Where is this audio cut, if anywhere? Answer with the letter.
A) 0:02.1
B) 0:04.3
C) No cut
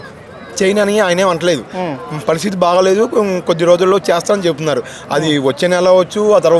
C